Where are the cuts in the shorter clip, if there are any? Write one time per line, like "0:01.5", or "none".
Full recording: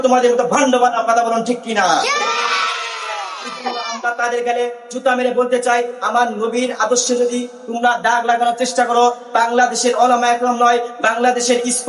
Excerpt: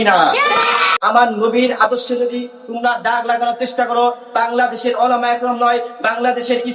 0:01.0

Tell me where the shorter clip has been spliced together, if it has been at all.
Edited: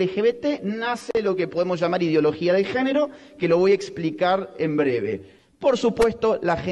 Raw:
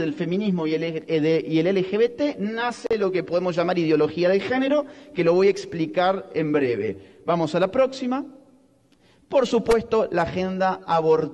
0:05.3

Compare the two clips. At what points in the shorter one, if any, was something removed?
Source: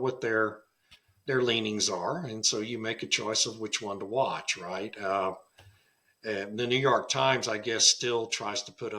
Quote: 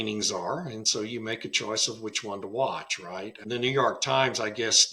0:03.4

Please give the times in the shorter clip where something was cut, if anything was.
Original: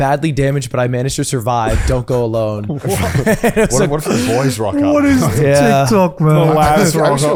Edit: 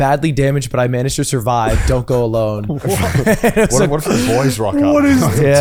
none

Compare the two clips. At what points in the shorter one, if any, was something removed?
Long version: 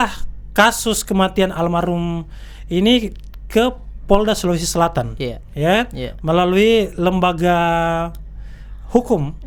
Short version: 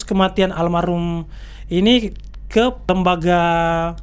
0:02.8

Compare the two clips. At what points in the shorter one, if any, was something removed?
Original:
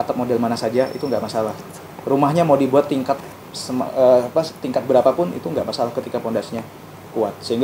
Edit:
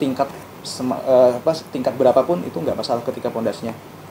none

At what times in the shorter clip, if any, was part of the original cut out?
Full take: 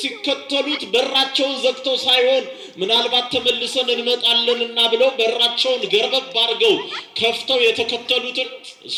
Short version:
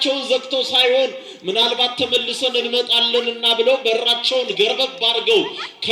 none

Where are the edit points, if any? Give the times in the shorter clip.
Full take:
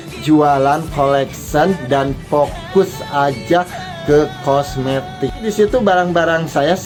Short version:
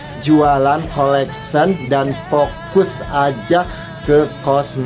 none

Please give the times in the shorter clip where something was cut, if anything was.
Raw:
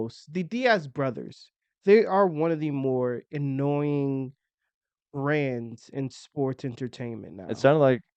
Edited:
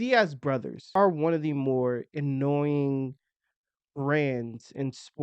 0:00.9

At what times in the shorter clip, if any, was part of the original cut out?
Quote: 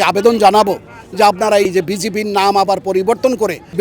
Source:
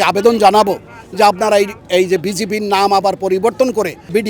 0:01.7

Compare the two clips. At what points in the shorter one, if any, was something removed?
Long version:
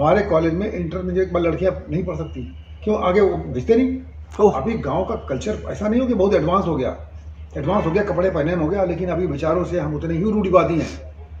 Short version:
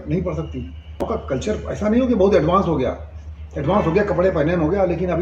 0:01.0

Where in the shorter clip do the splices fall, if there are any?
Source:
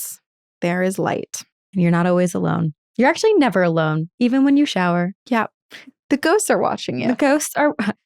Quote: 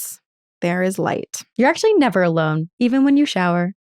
0:01.4

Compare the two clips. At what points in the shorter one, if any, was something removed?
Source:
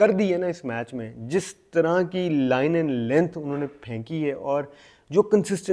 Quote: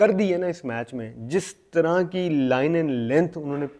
none

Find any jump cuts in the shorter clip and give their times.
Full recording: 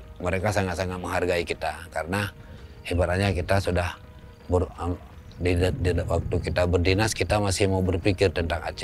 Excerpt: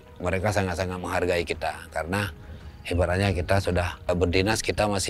0:04.1

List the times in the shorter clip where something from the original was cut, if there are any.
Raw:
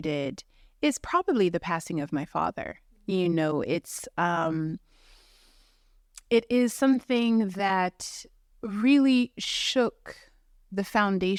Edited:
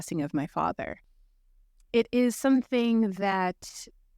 0:01.1

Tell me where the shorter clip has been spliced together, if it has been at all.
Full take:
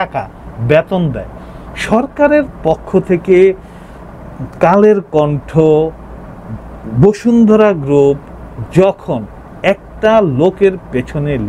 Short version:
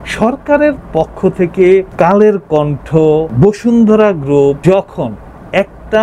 0:01.9
0:03.3
0:04.6

